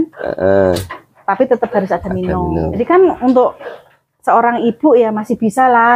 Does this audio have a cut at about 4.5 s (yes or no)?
no